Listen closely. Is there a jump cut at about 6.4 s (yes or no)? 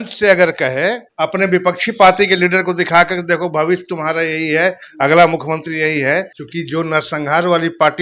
yes